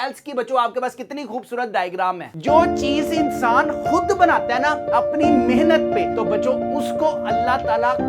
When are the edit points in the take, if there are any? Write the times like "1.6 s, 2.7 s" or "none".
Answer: 2.3 s